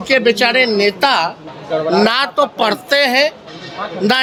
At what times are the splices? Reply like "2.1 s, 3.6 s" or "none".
none